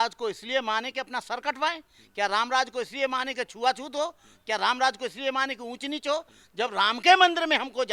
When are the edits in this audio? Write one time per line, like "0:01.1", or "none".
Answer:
none